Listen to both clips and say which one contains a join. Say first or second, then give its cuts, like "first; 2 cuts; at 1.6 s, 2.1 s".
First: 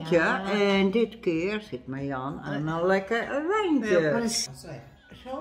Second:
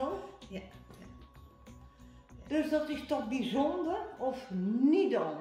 first; 1 cut; at 4.4 s